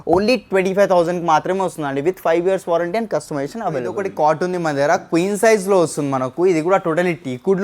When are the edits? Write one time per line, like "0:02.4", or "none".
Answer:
0:04.0

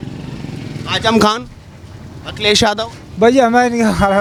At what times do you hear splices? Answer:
none

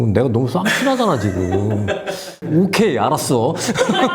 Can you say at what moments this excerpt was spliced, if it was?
0:02.2

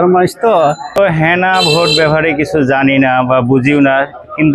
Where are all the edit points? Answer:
0:01.0

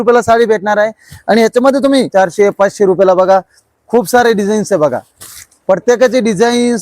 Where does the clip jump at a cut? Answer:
0:02.1

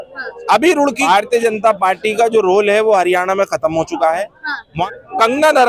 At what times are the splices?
0:01.0
0:04.5

